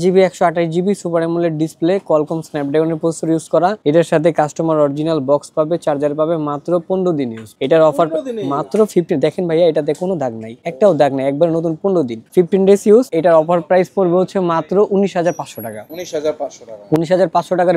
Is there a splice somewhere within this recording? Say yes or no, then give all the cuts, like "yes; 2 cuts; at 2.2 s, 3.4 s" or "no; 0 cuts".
no; 0 cuts